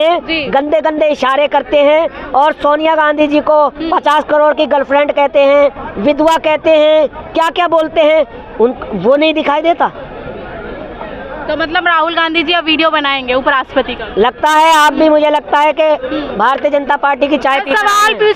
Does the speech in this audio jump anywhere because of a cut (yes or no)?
no